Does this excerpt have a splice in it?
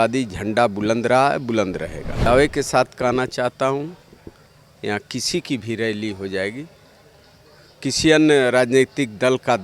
yes; 1 cut; at 2.2 s

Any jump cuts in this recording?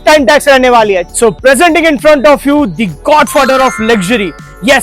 yes; 1 cut; at 1.0 s

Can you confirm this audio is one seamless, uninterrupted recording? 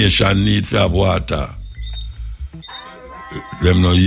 no; 1 cut; at 2.7 s

